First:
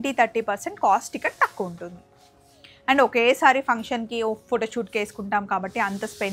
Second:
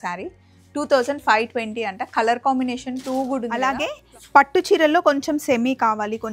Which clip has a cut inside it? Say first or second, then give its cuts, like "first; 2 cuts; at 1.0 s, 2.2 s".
second; 1 cut; at 3.7 s